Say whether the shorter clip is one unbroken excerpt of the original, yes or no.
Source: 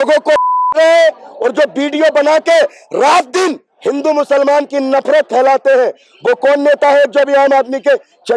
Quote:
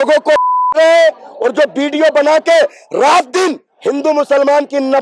yes